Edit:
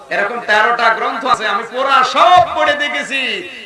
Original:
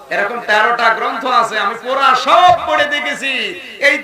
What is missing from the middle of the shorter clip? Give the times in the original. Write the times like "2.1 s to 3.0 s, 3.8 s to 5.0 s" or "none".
1.3 s to 1.4 s